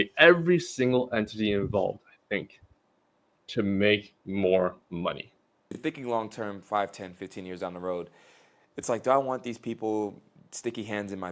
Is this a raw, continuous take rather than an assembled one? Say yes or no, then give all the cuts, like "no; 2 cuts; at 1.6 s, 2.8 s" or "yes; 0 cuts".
no; 1 cut; at 5.7 s